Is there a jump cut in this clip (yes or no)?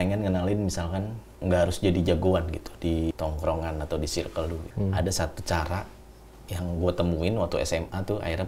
yes